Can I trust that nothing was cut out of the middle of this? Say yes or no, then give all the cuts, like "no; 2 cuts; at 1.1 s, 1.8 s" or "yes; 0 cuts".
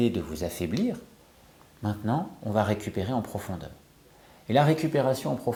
yes; 0 cuts